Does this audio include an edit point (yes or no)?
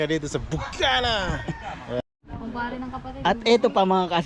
yes